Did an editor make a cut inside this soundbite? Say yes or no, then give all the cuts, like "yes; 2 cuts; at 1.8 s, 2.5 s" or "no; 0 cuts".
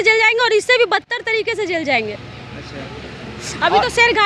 no; 0 cuts